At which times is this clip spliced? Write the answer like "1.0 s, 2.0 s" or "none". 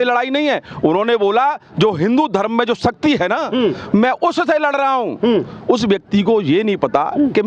none